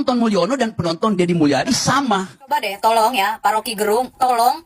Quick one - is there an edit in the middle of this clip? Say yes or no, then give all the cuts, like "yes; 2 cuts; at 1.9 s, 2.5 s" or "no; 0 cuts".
yes; 1 cut; at 2.4 s